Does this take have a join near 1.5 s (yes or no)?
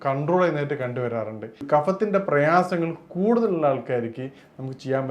yes